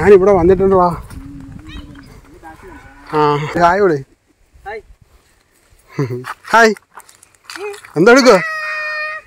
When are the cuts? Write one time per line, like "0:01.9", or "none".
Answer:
0:03.5